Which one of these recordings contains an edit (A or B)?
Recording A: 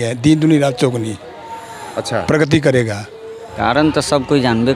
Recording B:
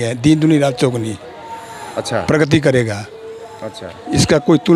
A